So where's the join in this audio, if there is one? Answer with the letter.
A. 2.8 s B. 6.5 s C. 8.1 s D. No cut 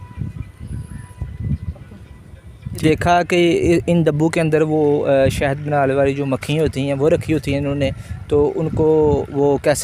A